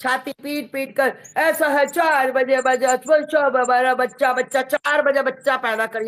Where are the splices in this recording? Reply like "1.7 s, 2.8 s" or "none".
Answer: none